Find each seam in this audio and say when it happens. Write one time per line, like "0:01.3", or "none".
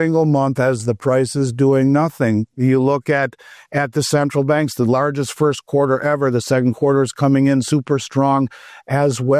none